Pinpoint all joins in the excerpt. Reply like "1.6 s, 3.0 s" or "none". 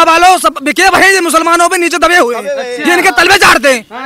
none